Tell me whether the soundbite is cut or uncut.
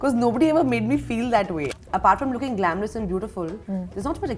cut